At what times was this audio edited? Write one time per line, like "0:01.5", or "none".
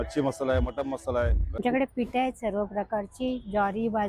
0:01.6